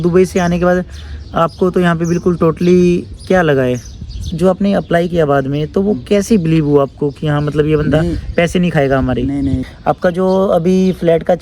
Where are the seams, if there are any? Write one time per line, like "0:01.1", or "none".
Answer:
0:04.3
0:09.7